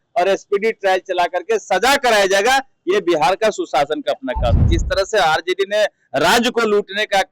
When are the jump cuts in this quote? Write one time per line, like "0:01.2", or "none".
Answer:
0:04.7